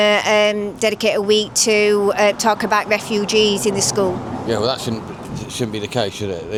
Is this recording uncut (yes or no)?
yes